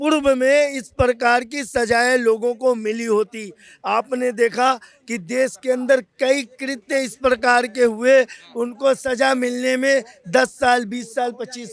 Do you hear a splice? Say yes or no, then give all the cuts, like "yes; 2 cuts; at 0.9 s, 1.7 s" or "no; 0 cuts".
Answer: no; 0 cuts